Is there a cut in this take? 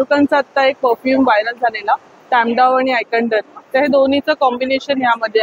no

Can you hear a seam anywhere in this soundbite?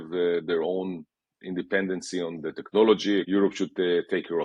yes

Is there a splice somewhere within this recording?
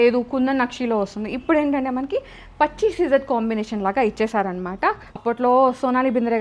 yes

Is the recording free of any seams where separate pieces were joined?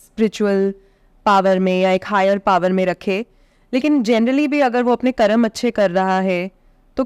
yes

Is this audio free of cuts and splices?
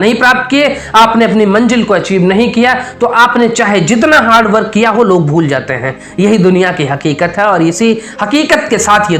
yes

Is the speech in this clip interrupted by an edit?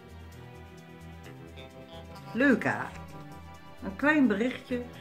yes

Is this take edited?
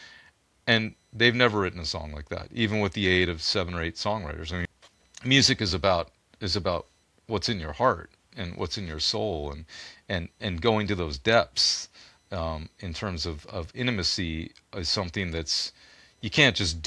yes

